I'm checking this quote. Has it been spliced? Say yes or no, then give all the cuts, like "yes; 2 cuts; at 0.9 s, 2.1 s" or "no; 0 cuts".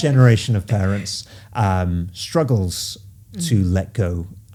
no; 0 cuts